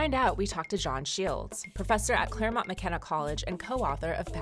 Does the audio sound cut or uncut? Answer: cut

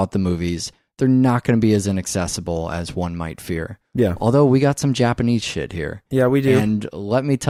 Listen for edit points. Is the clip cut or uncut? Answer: uncut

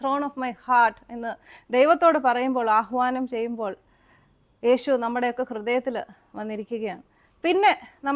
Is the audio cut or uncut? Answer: uncut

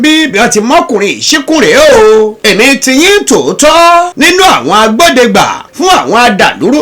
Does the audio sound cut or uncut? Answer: cut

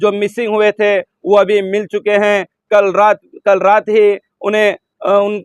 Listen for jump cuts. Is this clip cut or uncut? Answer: uncut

